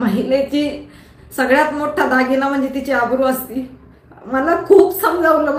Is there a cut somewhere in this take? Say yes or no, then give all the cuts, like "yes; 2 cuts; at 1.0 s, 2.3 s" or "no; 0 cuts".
no; 0 cuts